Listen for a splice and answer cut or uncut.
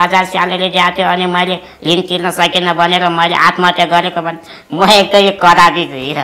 uncut